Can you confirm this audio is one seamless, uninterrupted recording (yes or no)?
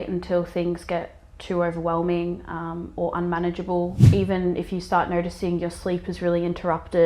no